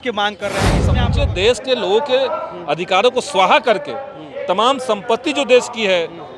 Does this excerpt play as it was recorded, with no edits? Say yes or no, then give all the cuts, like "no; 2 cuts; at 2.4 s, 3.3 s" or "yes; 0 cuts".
no; 1 cut; at 1.0 s